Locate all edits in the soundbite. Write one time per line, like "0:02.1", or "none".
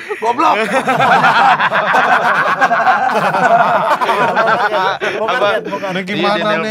none